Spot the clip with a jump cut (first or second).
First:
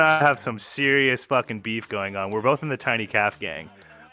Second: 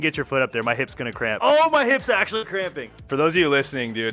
second